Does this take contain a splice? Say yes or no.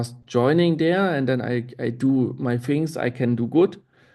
no